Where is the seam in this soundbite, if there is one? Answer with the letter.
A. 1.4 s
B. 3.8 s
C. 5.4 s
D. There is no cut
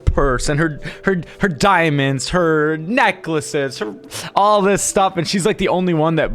D